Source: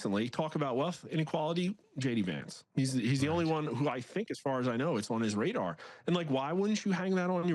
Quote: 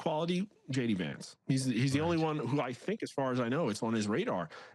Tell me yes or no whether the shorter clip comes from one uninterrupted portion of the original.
yes